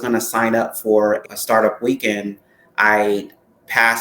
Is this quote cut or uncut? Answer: cut